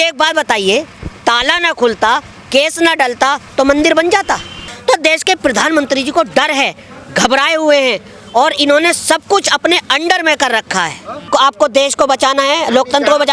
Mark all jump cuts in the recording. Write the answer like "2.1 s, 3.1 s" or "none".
4.7 s, 11.2 s